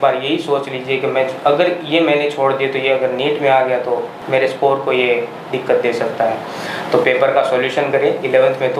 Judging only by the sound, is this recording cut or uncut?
uncut